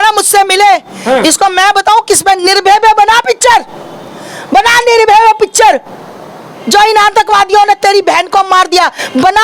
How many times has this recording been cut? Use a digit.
0